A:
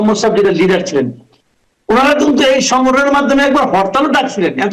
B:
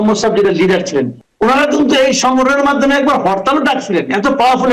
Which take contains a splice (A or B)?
B